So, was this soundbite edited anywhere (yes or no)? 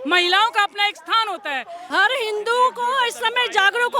no